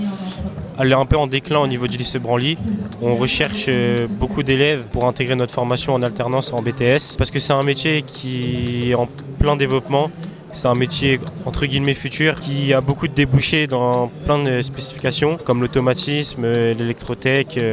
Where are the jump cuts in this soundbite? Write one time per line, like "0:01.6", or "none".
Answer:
0:04.9
0:07.2
0:12.4
0:15.4